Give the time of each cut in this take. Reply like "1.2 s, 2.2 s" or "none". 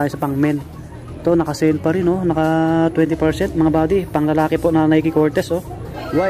none